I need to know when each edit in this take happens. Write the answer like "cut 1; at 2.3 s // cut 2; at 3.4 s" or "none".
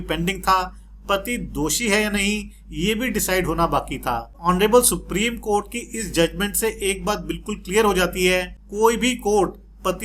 cut 1; at 4.4 s // cut 2; at 8.6 s